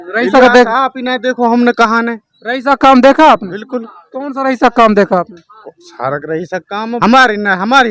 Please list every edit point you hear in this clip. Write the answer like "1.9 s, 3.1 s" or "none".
7.0 s